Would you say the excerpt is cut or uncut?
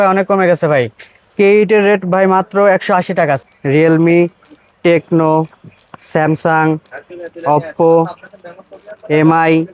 cut